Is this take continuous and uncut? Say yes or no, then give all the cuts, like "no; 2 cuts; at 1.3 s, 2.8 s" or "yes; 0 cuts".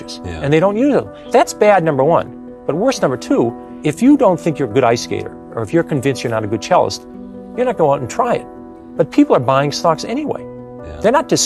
no; 2 cuts; at 1.2 s, 3.7 s